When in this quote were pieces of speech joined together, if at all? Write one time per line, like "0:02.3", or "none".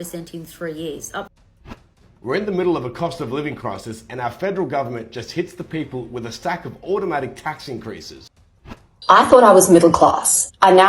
0:01.9
0:08.6